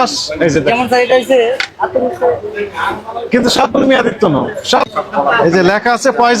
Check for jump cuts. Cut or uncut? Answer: cut